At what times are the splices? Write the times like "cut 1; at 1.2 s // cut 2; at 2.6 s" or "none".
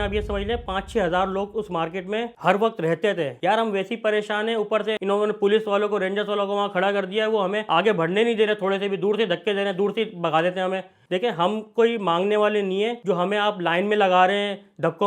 cut 1; at 3.3 s // cut 2; at 11.0 s